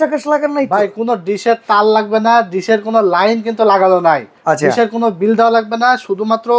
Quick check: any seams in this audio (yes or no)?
yes